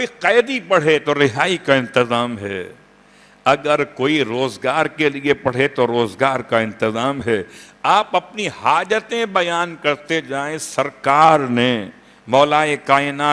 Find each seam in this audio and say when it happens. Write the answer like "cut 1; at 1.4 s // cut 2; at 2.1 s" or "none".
none